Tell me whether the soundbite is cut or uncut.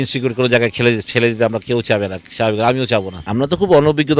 cut